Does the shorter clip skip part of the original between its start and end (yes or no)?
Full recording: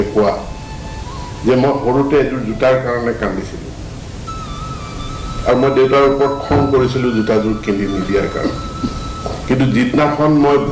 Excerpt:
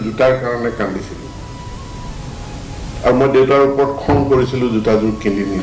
no